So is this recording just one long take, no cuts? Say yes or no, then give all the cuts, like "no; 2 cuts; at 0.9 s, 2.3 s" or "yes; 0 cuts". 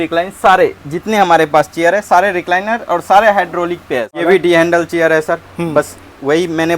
no; 1 cut; at 4.2 s